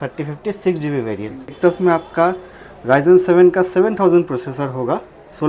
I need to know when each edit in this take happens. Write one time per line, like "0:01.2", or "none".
0:01.5